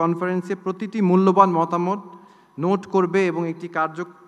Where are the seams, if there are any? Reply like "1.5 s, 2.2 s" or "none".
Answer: none